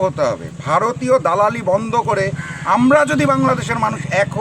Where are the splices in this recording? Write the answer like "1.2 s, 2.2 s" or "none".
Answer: none